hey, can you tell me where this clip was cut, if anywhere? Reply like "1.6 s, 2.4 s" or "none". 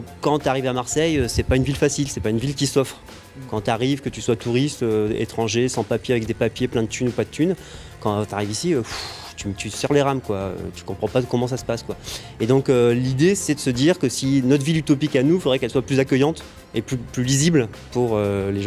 none